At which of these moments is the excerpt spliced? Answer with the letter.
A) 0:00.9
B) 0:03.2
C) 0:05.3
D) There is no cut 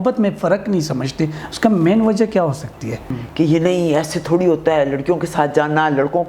B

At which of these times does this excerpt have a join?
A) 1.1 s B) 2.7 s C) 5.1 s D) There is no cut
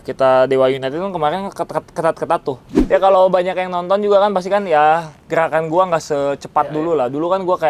B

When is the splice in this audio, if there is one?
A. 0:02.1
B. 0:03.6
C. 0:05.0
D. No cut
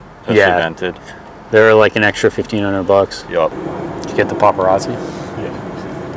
D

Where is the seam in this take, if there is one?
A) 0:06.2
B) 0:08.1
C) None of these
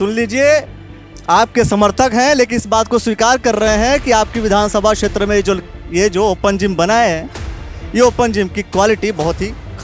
C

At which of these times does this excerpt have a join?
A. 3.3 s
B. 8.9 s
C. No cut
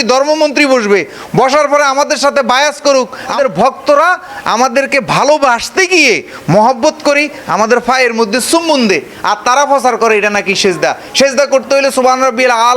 A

